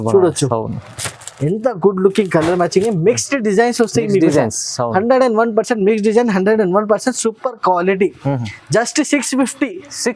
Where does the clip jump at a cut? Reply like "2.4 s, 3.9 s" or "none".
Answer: none